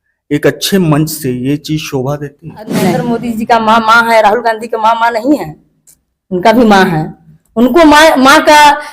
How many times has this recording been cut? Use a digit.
1